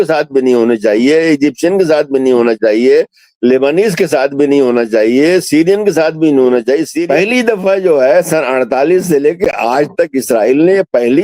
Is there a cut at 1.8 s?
no; 1 cut; at 7.0 s

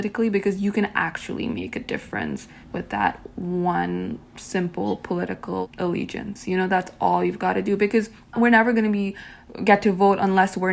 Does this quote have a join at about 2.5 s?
yes; 3 cuts; at 2.5 s, 5.6 s, 8.3 s

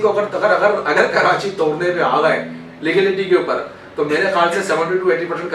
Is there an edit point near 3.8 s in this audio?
no; 0 cuts

